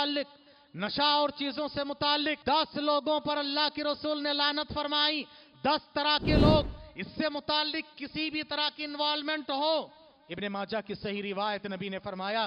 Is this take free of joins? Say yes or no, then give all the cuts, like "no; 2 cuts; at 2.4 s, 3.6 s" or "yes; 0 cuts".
no; 1 cut; at 2.4 s